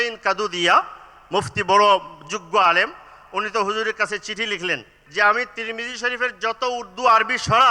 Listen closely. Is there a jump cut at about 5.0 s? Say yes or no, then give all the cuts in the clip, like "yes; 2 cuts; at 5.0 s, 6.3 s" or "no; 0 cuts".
yes; 1 cut; at 5.0 s